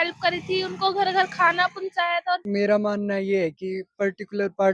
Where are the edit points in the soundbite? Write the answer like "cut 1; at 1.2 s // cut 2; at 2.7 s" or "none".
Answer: cut 1; at 2.4 s